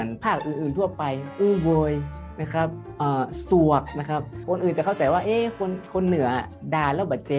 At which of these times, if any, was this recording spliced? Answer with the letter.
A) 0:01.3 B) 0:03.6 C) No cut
A